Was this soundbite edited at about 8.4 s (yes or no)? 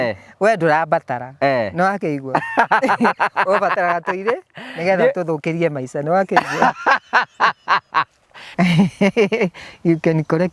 yes